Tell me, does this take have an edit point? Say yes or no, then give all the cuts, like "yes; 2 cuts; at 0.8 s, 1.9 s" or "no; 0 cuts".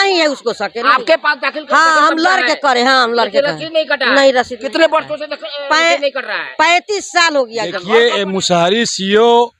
yes; 1 cut; at 7.8 s